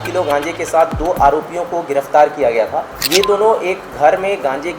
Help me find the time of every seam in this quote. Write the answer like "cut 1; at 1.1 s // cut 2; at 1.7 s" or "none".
cut 1; at 3.0 s